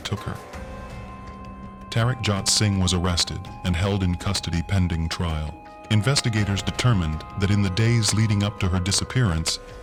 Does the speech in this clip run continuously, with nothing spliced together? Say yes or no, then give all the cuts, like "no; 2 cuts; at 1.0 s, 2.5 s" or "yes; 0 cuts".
yes; 0 cuts